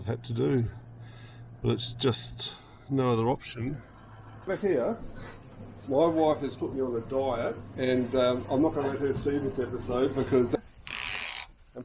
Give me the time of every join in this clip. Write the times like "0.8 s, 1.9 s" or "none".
4.5 s, 10.6 s